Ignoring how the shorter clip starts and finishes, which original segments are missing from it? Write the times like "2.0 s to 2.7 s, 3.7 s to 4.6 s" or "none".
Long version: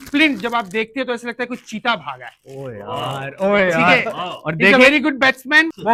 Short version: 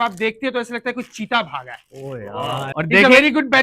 3.2 s to 4.4 s